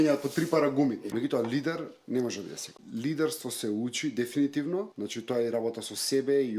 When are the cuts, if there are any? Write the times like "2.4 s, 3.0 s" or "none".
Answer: 1.0 s, 2.8 s, 5.0 s